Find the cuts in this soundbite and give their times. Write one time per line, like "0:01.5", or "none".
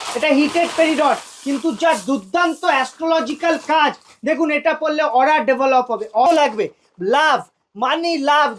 0:06.3